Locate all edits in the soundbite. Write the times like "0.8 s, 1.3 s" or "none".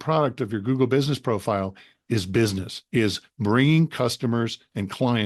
2.7 s